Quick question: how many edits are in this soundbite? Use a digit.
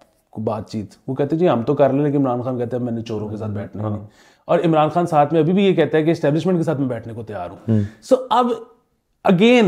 0